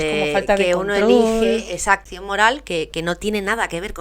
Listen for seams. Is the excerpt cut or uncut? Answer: cut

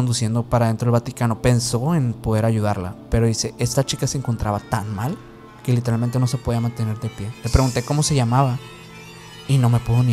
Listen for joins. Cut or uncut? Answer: uncut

